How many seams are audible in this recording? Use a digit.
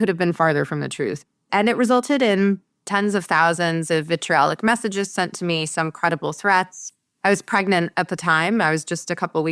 2